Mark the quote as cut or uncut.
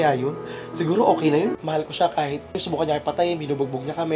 cut